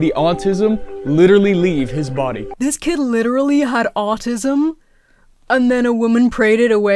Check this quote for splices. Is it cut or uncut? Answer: cut